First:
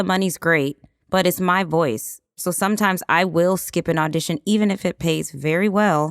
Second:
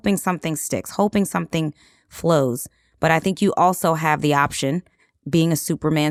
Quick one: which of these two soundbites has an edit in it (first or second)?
first